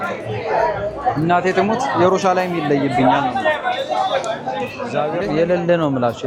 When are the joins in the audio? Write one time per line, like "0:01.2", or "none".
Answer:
0:05.0

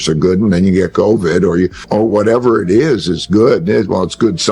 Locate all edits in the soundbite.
0:01.8

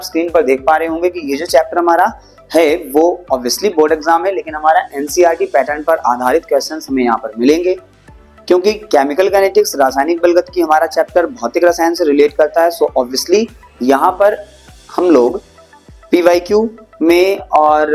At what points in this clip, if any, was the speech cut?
none

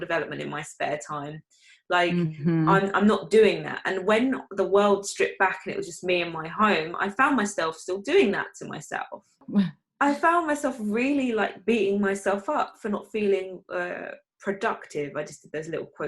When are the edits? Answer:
0:09.4

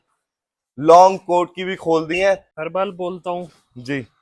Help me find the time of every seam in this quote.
0:02.5

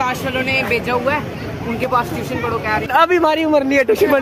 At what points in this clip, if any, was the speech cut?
0:02.9

